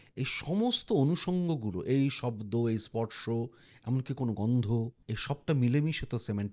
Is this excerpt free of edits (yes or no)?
no